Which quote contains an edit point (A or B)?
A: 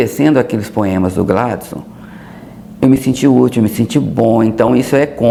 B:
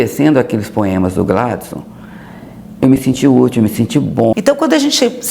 B